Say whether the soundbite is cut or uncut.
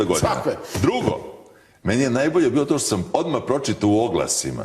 cut